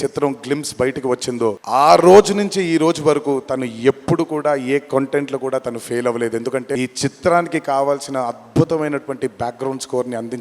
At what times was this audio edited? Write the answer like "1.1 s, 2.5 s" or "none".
1.6 s, 6.8 s